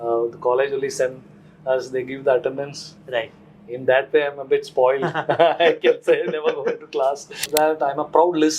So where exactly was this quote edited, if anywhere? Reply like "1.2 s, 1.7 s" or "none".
7.3 s